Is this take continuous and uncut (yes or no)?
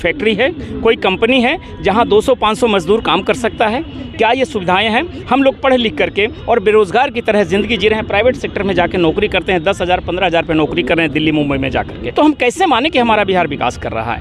yes